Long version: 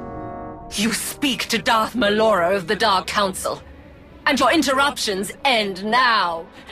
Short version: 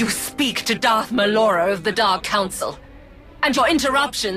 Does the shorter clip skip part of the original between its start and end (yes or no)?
no